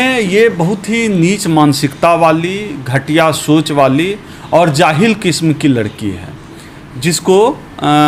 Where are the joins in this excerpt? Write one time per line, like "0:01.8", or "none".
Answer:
none